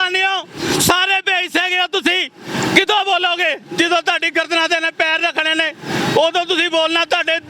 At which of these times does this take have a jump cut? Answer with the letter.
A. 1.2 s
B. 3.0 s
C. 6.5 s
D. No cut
D